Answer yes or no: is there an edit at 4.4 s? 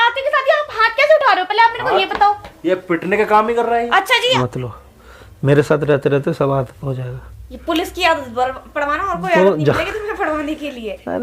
yes